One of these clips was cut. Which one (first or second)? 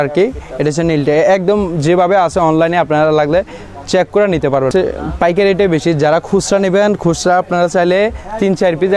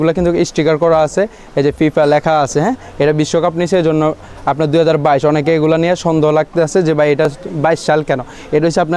first